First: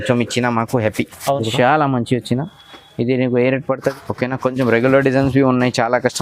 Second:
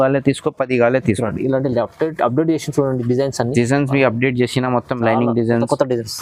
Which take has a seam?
first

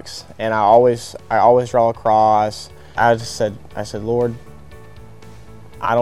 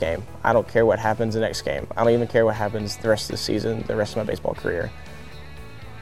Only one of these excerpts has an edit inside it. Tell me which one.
first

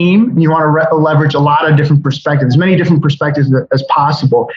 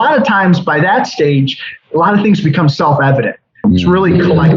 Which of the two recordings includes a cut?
second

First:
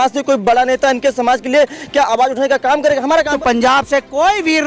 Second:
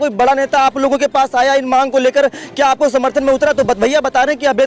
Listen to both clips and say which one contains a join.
first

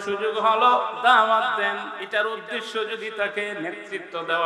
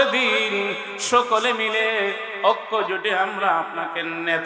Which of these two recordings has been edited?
first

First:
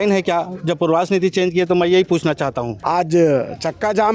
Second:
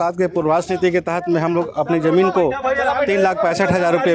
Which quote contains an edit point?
first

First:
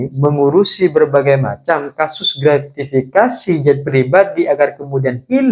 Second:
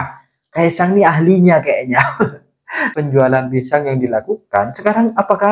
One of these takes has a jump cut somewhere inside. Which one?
second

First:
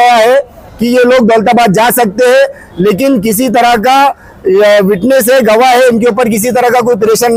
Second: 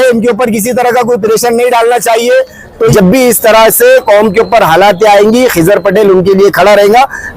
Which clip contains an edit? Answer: second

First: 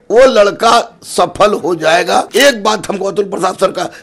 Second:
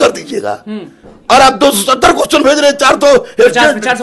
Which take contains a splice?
first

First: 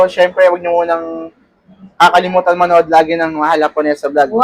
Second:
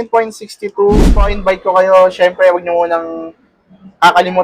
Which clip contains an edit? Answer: second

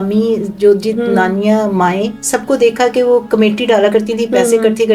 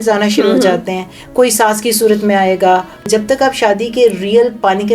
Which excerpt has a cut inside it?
second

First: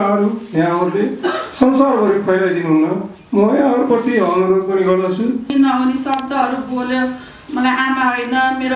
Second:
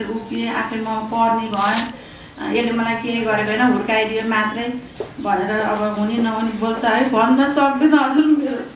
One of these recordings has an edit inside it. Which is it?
first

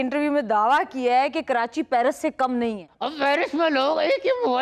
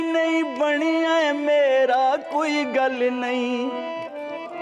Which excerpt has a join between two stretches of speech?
first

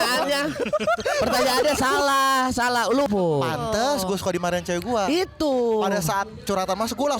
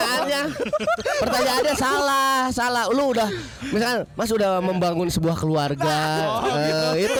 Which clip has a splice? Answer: first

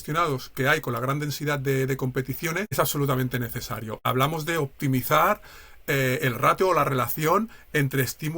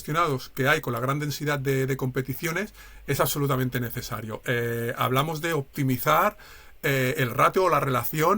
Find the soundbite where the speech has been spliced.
first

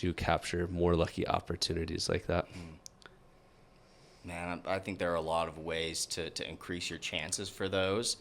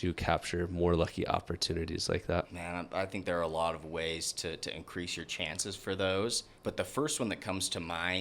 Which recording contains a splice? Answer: second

